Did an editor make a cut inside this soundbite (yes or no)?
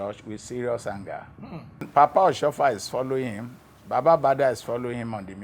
yes